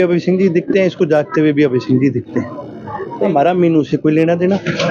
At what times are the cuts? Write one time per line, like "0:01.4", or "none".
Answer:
0:03.3